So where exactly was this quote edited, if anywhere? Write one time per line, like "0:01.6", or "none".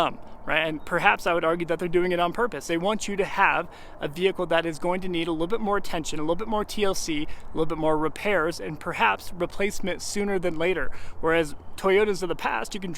none